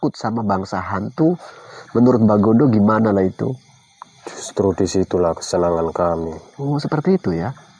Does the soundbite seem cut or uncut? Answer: uncut